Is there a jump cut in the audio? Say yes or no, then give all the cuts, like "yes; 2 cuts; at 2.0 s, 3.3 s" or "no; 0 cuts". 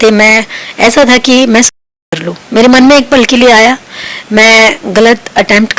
no; 0 cuts